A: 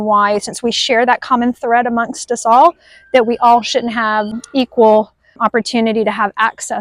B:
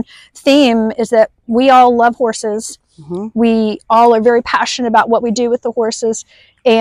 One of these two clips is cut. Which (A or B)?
A